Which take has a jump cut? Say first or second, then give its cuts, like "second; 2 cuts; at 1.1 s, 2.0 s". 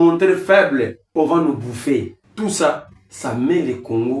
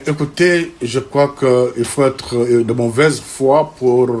first; 2 cuts; at 1.0 s, 2.2 s